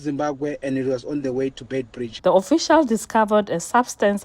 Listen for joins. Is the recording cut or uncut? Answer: cut